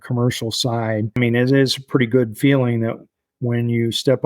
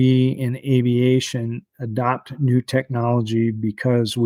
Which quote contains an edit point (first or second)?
first